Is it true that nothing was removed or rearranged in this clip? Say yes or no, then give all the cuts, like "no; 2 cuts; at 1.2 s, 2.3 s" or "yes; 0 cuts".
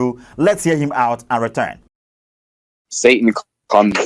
yes; 0 cuts